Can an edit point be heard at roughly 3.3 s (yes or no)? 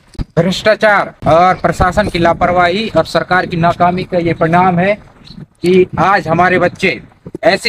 no